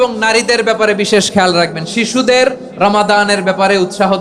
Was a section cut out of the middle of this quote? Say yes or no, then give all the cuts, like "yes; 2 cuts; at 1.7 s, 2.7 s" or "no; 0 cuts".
no; 0 cuts